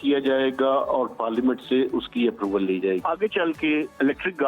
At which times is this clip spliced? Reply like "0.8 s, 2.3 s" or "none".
3.0 s